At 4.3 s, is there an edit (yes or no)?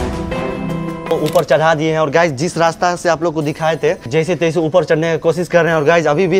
no